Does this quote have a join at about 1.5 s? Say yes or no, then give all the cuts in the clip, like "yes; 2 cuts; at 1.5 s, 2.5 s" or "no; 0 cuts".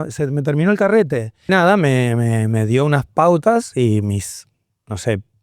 yes; 1 cut; at 1.5 s